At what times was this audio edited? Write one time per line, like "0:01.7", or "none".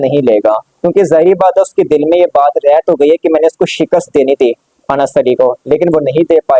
none